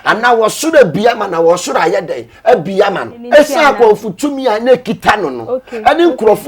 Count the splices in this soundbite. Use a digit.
1